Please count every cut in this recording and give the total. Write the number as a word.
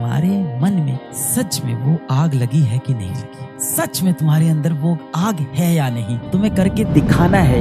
zero